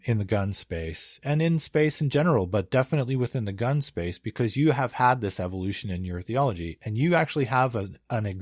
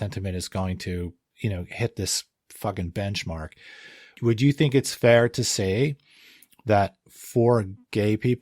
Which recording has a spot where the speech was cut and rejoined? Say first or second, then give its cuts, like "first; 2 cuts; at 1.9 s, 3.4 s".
second; 2 cuts; at 1.2 s, 4.1 s